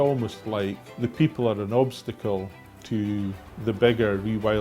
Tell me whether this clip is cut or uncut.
cut